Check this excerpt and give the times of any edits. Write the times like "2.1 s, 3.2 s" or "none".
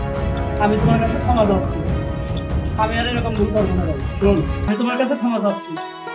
4.7 s